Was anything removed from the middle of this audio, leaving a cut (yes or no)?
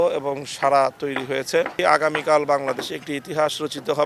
yes